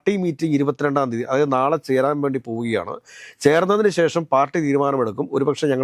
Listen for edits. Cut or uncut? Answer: uncut